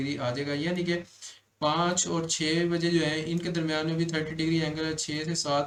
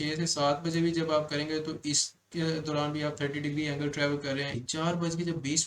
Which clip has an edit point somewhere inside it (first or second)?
second